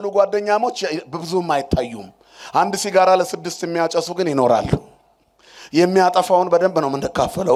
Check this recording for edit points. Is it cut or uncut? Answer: uncut